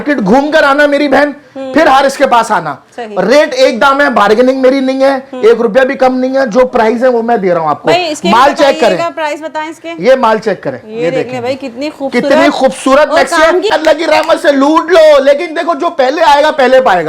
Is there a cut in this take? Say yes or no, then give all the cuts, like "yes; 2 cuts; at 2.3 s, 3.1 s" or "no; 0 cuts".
yes; 1 cut; at 13.7 s